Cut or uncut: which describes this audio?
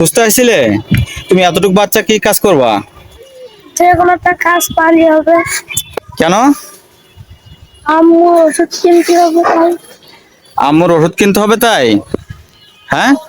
uncut